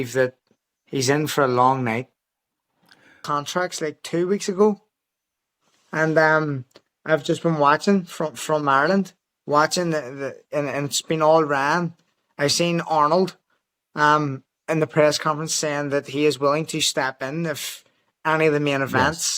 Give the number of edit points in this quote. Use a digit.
1